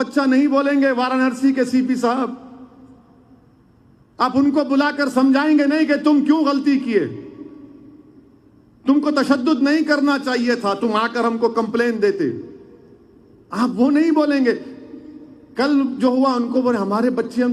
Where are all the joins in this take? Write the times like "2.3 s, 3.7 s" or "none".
none